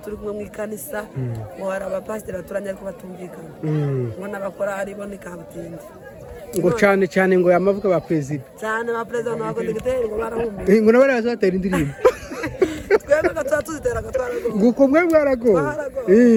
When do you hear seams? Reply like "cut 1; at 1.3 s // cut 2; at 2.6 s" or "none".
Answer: none